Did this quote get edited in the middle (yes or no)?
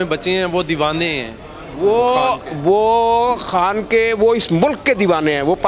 no